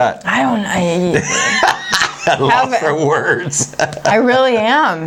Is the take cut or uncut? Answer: uncut